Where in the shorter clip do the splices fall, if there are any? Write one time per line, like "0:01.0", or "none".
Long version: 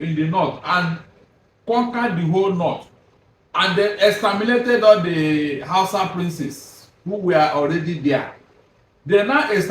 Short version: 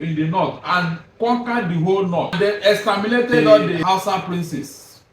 0:01.0
0:02.3
0:03.8